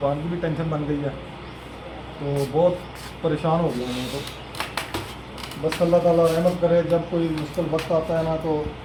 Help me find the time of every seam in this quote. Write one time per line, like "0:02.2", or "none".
none